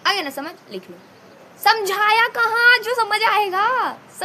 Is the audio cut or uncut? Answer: uncut